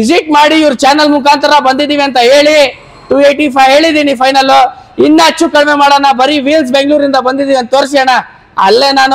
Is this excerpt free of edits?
yes; 0 cuts

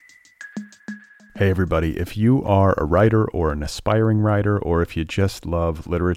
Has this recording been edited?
yes; 1 cut; at 1.0 s

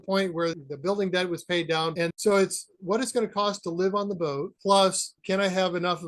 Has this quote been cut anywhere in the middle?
yes; 2 cuts; at 1.9 s, 5.2 s

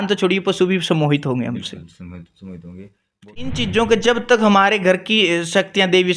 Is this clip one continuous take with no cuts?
no; 1 cut; at 3.5 s

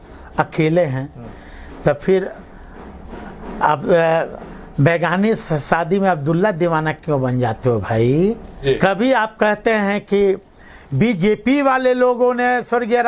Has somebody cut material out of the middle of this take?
yes; 1 cut; at 8.5 s

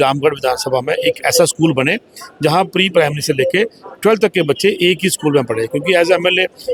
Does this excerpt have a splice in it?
no; 0 cuts

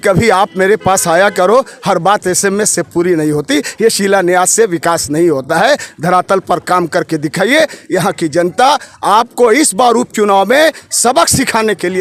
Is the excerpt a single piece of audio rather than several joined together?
yes; 0 cuts

